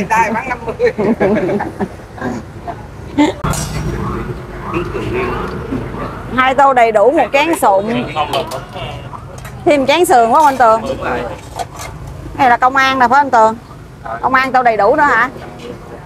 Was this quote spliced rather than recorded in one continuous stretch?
yes; 1 cut; at 3.4 s

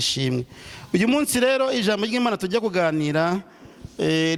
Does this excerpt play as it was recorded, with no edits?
yes; 0 cuts

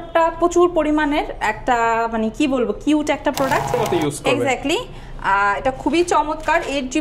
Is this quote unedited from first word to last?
no; 1 cut; at 3.8 s

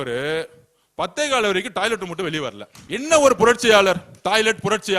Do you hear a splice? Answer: yes; 1 cut; at 2.7 s

